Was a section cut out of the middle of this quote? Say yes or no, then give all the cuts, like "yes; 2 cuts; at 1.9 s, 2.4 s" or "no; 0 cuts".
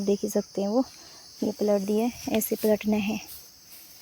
no; 0 cuts